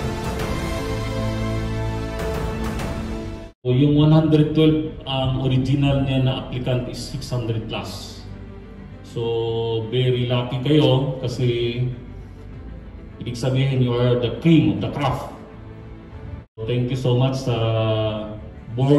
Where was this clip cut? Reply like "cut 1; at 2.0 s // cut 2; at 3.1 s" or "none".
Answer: cut 1; at 3.6 s // cut 2; at 16.6 s